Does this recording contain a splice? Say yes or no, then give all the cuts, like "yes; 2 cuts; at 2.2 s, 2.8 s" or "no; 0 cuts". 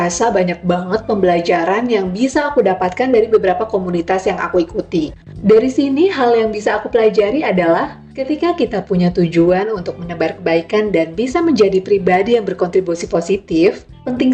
yes; 1 cut; at 5.2 s